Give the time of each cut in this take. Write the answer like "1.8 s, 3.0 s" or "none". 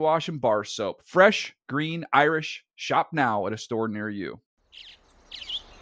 4.5 s